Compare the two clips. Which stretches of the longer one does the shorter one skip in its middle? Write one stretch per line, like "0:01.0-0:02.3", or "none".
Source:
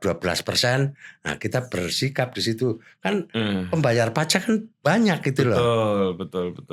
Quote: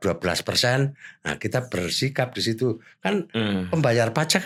none